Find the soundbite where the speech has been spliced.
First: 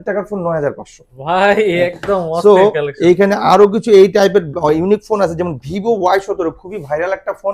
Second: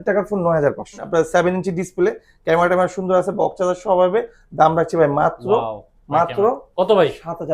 second; 1 cut; at 1.0 s

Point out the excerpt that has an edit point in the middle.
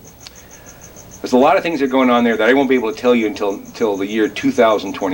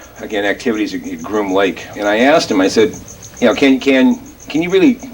second; 1 cut; at 2.1 s

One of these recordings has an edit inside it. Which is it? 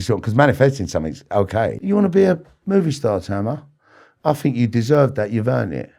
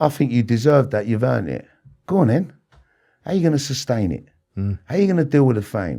first; 1 cut; at 1.8 s

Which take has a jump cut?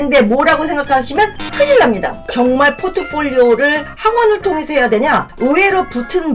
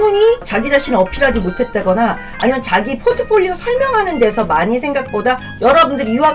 first; 1 cut; at 2.2 s

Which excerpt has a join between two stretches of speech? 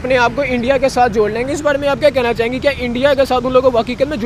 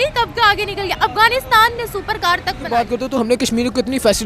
second; 1 cut; at 2.6 s

